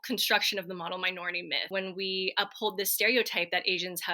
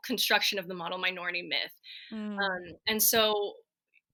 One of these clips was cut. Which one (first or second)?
first